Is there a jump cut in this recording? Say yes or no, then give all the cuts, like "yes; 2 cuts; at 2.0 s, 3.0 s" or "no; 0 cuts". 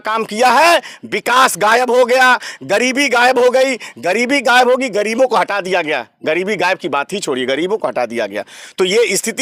no; 0 cuts